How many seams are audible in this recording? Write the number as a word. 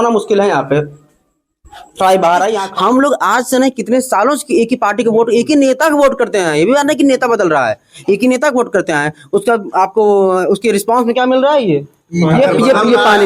one